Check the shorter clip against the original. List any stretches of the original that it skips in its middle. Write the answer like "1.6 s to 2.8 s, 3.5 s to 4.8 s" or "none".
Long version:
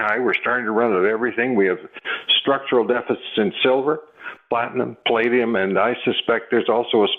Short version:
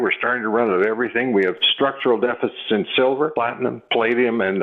1.9 s to 2.3 s, 4.0 s to 4.5 s